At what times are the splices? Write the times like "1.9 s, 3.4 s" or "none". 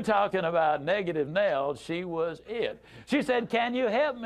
none